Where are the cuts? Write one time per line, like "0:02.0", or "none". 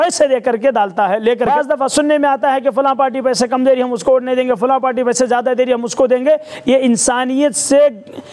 0:01.5